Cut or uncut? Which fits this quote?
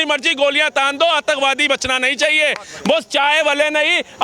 uncut